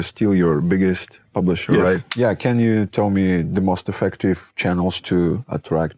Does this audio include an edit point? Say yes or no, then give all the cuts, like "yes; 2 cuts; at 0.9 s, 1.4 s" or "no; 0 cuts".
yes; 1 cut; at 2.1 s